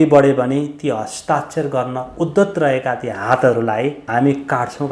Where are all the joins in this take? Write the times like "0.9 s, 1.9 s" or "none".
4.0 s